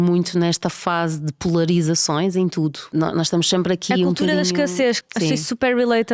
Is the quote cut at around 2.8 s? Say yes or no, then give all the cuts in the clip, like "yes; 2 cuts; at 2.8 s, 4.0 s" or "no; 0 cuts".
yes; 2 cuts; at 2.8 s, 5.1 s